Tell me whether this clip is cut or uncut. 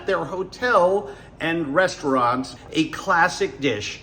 cut